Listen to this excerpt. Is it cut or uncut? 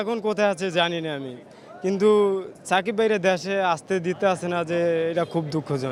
uncut